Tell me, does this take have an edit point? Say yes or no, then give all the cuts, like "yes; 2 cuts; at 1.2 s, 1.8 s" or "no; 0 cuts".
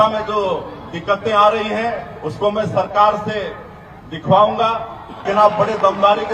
yes; 1 cut; at 5.2 s